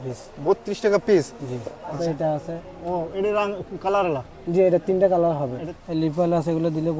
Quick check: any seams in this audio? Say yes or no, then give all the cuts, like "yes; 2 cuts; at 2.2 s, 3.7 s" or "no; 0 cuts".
yes; 2 cuts; at 2.0 s, 5.6 s